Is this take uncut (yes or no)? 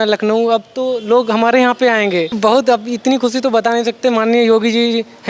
no